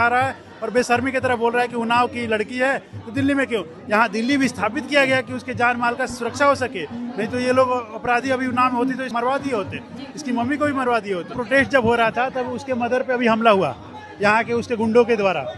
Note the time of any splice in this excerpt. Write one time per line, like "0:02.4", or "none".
0:03.8
0:09.1
0:11.3